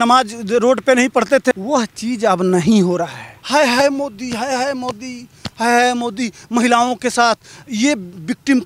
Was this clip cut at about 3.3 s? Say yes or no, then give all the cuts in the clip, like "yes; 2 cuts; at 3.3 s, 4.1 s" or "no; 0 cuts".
yes; 1 cut; at 3.3 s